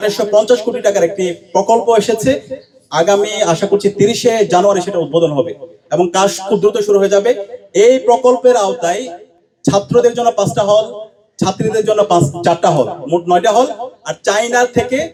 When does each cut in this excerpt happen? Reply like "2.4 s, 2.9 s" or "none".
none